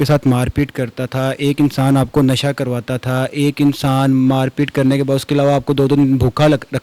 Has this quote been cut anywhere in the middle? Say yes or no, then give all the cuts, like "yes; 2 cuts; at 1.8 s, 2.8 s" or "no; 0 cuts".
no; 0 cuts